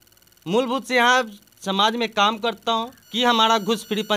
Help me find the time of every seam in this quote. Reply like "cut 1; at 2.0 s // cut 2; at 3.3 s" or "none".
cut 1; at 3.0 s